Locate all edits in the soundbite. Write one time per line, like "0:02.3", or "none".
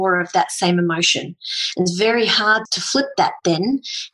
0:02.7